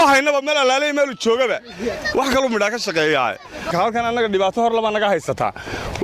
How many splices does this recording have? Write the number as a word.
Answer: one